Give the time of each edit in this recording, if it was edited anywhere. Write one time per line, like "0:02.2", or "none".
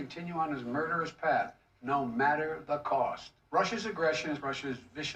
none